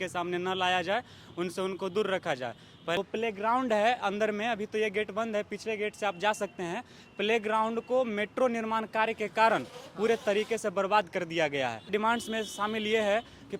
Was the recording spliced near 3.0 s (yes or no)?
yes